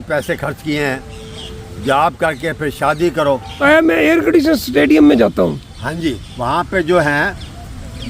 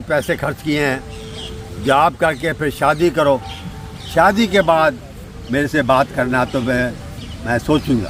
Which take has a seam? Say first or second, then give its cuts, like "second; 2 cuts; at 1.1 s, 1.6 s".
first; 1 cut; at 3.6 s